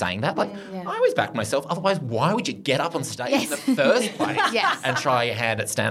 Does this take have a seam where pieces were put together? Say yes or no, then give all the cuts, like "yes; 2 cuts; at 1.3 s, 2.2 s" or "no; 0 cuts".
no; 0 cuts